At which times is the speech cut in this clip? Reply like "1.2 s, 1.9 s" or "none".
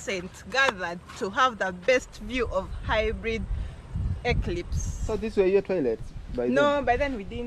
5.0 s